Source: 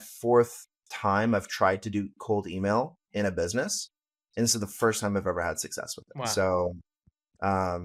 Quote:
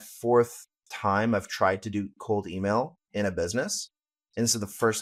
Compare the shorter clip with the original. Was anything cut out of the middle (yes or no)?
no